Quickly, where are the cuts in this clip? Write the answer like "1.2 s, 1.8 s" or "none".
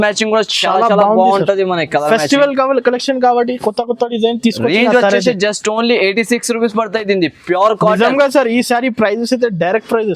none